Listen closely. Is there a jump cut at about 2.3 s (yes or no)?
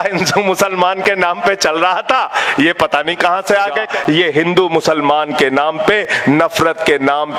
no